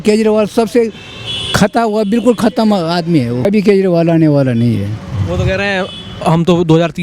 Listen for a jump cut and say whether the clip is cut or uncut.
cut